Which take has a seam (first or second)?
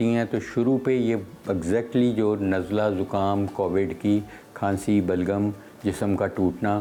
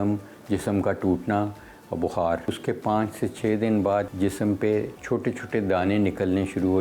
second